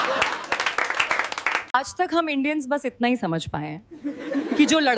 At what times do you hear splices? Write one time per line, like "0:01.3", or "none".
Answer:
0:01.6